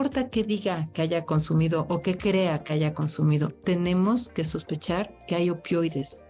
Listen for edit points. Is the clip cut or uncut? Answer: uncut